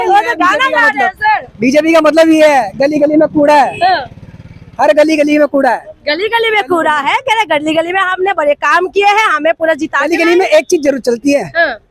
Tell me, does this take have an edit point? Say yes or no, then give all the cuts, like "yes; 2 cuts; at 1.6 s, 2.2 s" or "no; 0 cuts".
no; 0 cuts